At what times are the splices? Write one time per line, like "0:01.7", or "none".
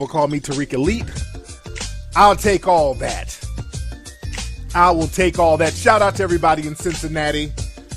none